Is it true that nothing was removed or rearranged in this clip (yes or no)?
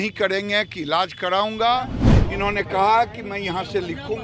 no